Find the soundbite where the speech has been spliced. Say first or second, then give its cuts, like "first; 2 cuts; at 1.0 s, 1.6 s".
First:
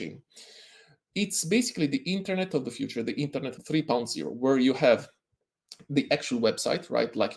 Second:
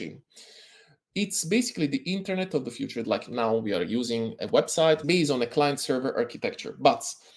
second; 2 cuts; at 3.0 s, 5.0 s